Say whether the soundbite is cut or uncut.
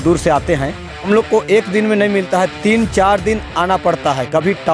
cut